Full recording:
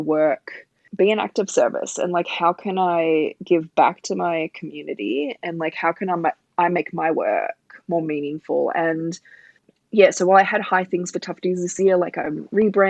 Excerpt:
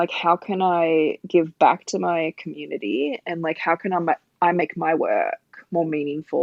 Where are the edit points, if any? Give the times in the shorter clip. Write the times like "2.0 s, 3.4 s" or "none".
none